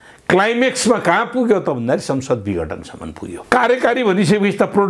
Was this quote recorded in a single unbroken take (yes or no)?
no